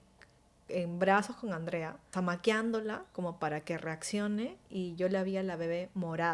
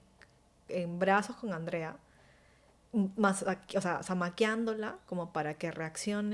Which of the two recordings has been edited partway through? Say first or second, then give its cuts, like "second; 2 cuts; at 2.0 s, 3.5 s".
first; 1 cut; at 2.1 s